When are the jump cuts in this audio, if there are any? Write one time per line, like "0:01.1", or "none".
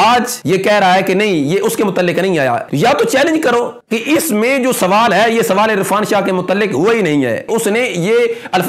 0:02.7
0:03.8
0:07.4

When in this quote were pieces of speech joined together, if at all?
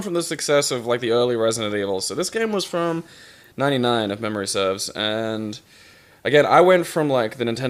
0:01.9

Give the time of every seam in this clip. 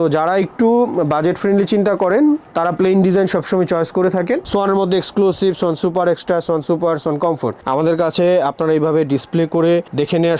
0:04.4
0:07.6

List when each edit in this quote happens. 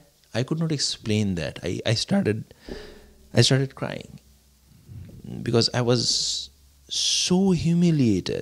none

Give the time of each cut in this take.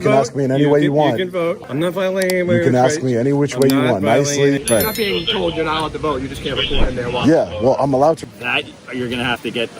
0:01.6
0:04.6
0:08.3

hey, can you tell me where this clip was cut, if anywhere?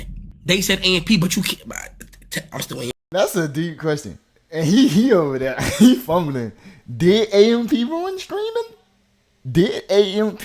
0:03.0

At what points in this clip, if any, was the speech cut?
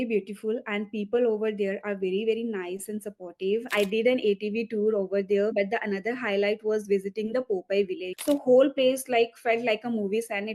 0:03.7
0:05.5
0:08.1

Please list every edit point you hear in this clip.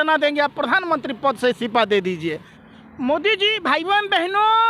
0:02.5

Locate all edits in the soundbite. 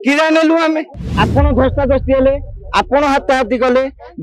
0:01.0

